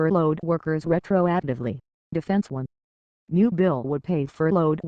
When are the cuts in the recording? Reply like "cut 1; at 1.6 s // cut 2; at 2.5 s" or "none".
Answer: cut 1; at 2.5 s

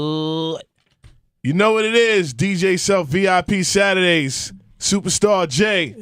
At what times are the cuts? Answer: none

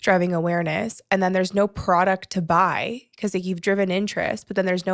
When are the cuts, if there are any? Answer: none

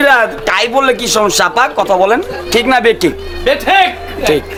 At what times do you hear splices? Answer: none

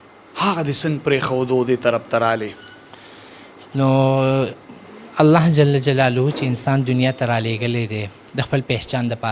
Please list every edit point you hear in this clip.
none

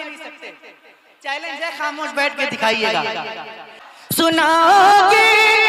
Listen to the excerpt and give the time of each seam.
cut 1; at 4.2 s

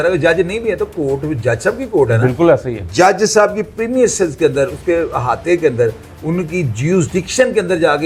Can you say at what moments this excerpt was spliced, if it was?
none

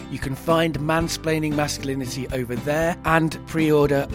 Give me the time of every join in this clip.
cut 1; at 3.2 s

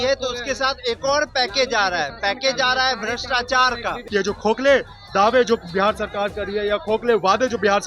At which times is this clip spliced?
cut 1; at 4.0 s

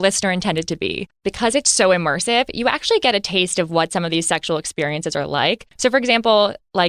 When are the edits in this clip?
cut 1; at 1.2 s // cut 2; at 5.7 s

